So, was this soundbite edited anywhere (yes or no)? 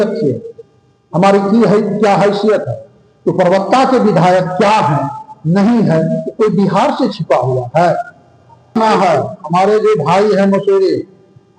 yes